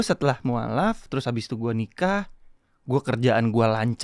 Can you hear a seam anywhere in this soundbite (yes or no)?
no